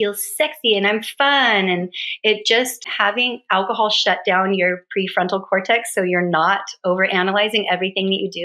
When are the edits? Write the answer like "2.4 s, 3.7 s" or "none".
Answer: 2.9 s